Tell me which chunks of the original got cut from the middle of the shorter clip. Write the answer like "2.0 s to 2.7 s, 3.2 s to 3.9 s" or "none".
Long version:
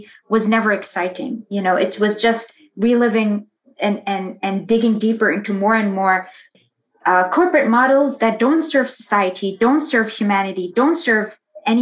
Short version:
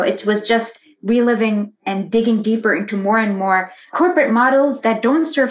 3.5 s to 4.3 s, 6.5 s to 7.3 s